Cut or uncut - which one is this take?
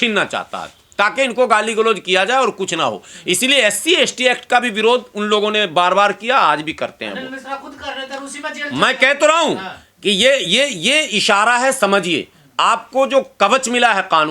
uncut